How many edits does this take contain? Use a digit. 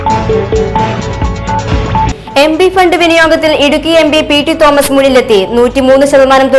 1